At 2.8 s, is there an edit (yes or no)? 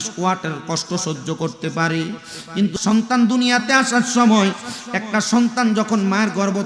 yes